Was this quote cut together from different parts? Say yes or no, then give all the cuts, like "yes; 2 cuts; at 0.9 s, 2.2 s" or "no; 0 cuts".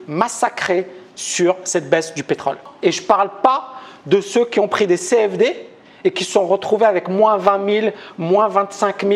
yes; 1 cut; at 2.7 s